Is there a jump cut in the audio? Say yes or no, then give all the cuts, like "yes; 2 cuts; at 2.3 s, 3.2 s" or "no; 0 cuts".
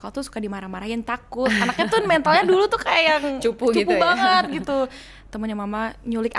yes; 1 cut; at 5.1 s